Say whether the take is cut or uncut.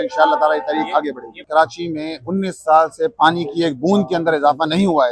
cut